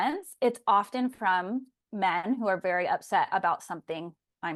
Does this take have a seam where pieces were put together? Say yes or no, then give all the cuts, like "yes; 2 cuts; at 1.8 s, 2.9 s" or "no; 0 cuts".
no; 0 cuts